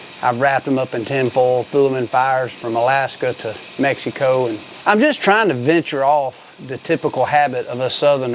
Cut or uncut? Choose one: cut